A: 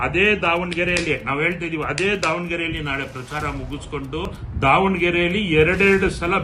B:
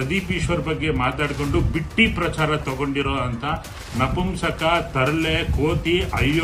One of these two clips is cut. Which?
A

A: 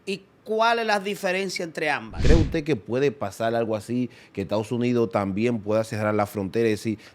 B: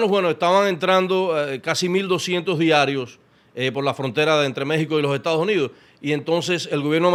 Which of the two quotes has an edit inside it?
A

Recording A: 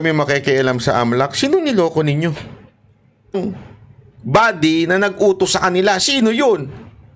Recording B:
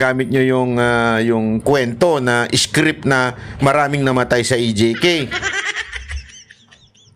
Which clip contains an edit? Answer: A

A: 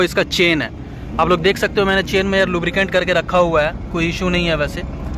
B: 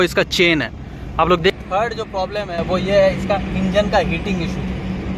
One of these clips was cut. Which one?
B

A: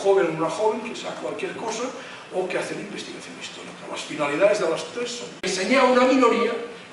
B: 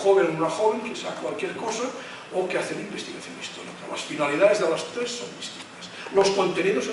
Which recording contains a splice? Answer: B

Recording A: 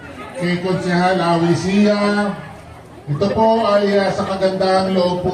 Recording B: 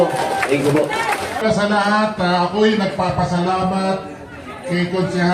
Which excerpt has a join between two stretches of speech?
B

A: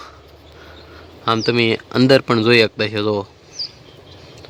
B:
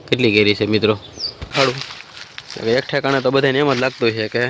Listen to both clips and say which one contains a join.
B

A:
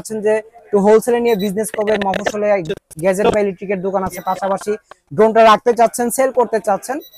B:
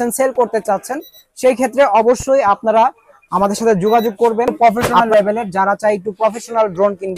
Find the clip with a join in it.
B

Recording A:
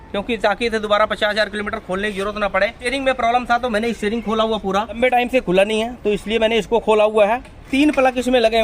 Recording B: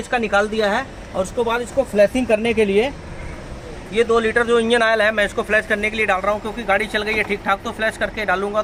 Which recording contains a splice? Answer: A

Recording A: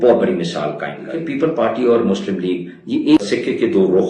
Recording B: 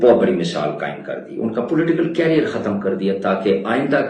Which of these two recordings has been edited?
A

